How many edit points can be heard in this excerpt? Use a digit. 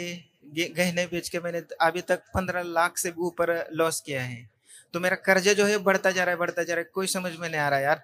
0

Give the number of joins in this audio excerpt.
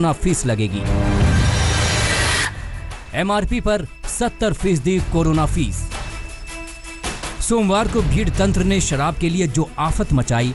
0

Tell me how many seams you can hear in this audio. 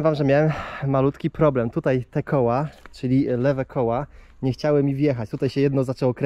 0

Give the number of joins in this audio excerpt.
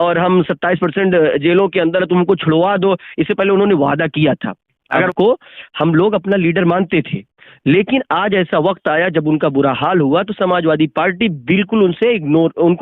1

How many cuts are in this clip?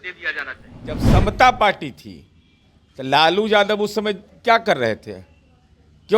1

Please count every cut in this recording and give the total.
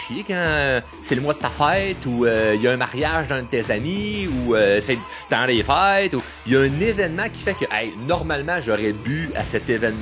0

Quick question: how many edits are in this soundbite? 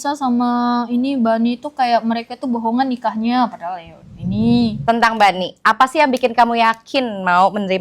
1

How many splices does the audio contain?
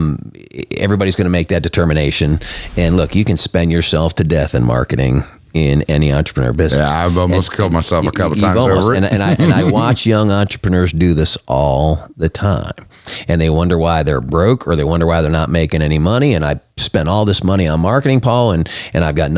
0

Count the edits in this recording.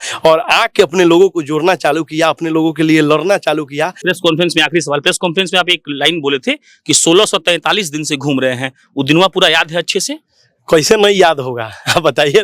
1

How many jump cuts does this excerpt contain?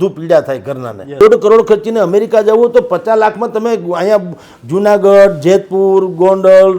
1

